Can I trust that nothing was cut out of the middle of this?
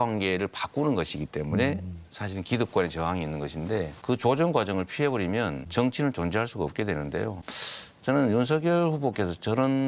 yes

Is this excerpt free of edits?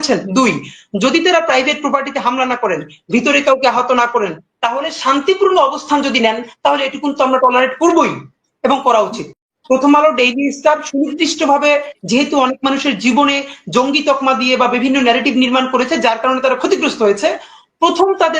no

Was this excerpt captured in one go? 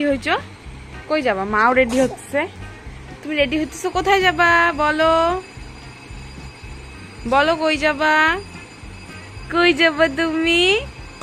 yes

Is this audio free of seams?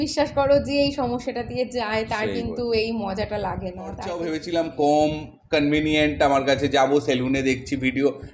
no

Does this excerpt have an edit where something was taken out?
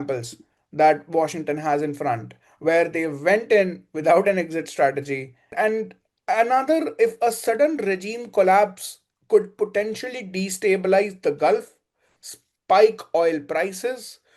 yes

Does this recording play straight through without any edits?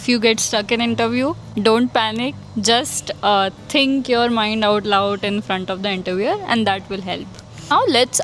yes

